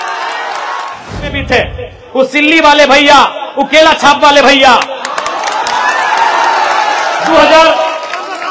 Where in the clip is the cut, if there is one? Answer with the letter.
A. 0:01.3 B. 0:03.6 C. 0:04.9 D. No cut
A